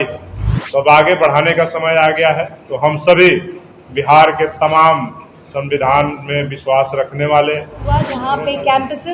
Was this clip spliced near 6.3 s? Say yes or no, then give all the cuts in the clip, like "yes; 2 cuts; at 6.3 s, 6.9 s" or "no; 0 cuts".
no; 1 cut; at 7.9 s